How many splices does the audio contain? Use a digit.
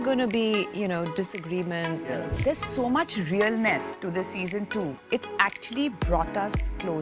1